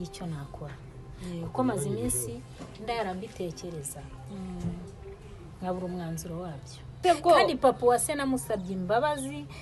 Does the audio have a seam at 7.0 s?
yes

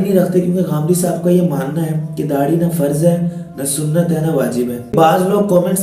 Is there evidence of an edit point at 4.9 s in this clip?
yes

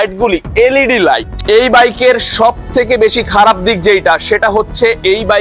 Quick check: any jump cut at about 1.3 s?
yes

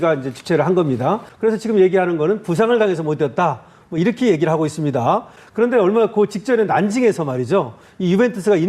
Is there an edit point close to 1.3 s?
yes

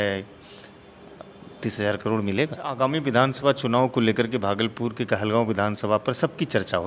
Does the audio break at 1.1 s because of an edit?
no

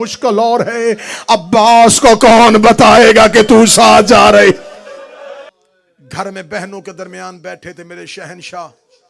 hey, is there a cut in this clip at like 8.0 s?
no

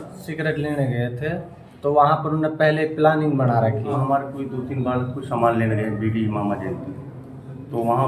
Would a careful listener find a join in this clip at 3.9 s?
yes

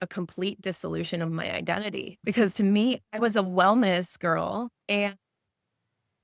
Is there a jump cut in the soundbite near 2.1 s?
yes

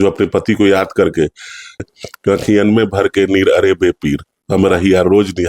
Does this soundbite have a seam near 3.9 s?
no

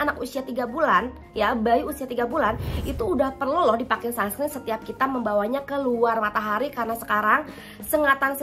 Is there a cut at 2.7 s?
no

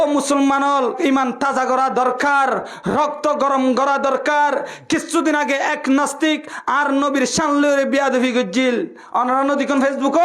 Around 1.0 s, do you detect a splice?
yes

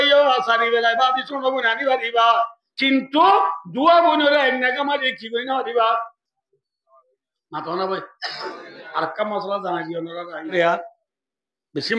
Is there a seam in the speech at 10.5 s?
yes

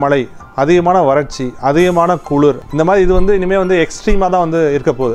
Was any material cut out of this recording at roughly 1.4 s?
no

